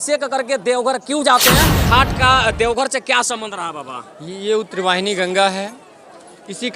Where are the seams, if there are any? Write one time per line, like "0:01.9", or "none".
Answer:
0:01.8